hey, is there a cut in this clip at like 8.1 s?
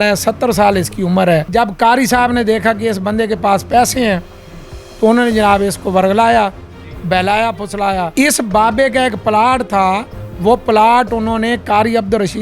yes; 2 cuts; at 1.5 s, 8.1 s

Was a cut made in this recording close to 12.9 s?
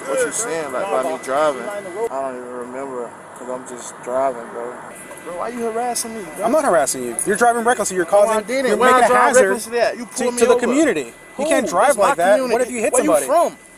no; 2 cuts; at 2.1 s, 4.8 s

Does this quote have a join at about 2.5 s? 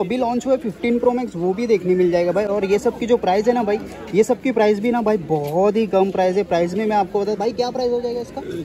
no; 0 cuts

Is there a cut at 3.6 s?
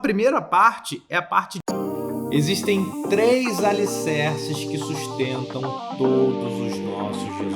no; 1 cut; at 1.5 s

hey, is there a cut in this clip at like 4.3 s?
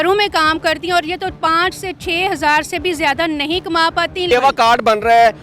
yes; 1 cut; at 4.3 s

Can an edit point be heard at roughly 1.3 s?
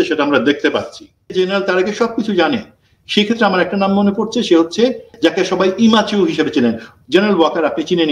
yes; 2 cuts; at 1.3 s, 5.1 s

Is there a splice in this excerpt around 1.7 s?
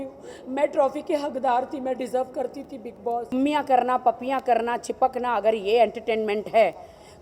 no; 1 cut; at 3.3 s

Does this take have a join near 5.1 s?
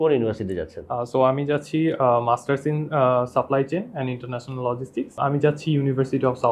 yes; 1 cut; at 5.1 s

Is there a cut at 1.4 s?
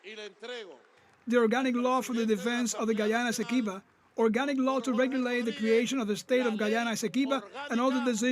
no; 1 cut; at 3.2 s

